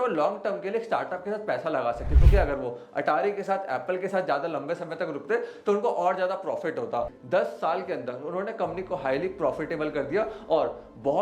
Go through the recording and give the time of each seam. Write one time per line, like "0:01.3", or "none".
0:07.2